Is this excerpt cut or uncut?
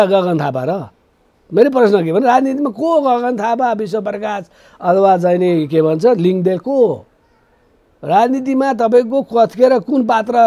uncut